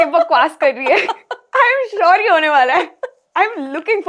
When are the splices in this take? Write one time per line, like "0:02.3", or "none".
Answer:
none